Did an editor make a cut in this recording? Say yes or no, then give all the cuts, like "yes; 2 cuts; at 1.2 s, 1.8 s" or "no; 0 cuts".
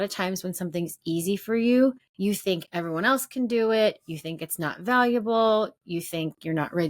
yes; 1 cut; at 2.1 s